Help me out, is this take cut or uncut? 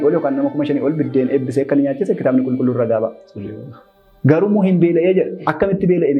uncut